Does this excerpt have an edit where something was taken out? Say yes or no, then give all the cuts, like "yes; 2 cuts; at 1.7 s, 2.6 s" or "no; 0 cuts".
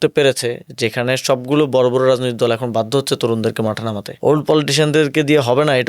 yes; 1 cut; at 4.0 s